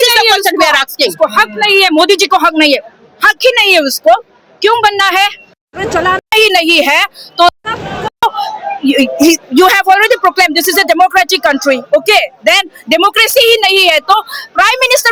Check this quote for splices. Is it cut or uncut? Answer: uncut